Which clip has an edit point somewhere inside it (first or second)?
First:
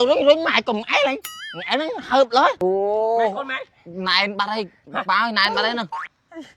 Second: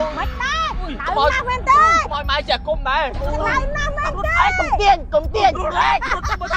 first